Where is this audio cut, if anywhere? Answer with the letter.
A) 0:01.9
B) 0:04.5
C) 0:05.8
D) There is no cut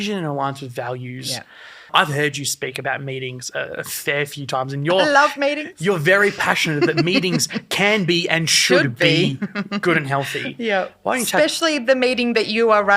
A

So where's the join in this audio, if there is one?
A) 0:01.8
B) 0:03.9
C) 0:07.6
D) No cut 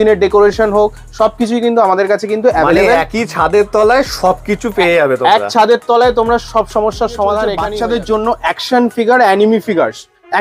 C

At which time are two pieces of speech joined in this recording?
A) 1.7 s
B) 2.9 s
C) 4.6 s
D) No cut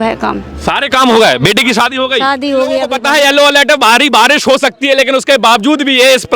B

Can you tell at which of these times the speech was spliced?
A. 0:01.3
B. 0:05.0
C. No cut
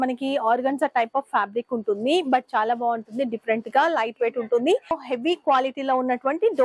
B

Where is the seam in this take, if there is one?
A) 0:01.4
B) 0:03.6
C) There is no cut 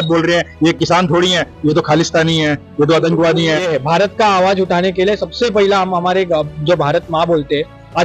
B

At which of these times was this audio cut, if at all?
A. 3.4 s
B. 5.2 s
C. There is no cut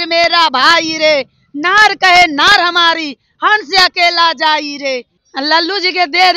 B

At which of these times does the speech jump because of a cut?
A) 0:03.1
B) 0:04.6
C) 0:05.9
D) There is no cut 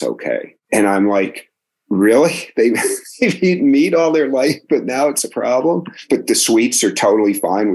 C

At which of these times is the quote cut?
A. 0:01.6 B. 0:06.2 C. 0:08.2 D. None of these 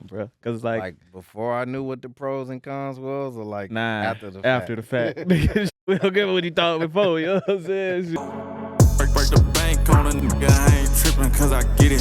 C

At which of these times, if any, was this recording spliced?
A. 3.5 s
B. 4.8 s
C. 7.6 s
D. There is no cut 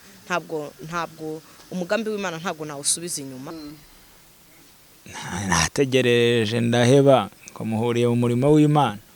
A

